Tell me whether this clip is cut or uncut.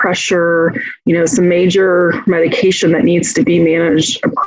uncut